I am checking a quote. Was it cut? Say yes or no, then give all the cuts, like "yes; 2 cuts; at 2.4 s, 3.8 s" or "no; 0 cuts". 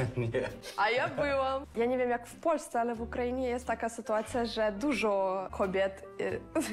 yes; 2 cuts; at 1.7 s, 5.5 s